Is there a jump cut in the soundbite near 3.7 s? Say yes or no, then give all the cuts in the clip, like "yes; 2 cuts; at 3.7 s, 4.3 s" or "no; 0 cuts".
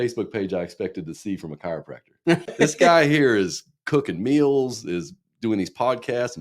no; 1 cut; at 2.5 s